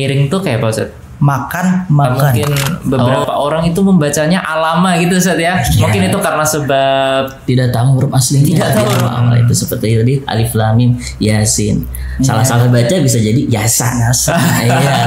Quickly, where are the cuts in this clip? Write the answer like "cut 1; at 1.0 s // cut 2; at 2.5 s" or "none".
cut 1; at 2.2 s // cut 2; at 9.0 s